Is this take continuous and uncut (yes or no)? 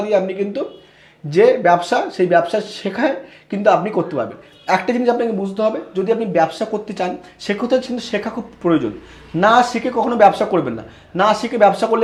yes